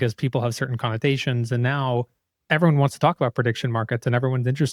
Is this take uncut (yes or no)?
yes